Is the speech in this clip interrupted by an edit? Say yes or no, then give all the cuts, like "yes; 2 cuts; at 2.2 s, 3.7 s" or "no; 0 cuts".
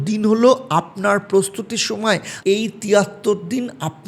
yes; 1 cut; at 2.3 s